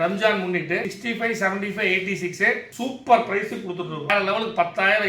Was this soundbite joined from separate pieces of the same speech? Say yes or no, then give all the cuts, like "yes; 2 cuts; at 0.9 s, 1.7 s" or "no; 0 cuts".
yes; 3 cuts; at 0.9 s, 2.7 s, 4.1 s